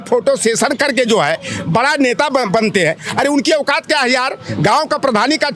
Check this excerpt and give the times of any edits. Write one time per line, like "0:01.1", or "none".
none